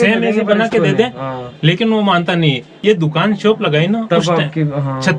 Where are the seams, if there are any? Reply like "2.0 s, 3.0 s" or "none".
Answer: 2.7 s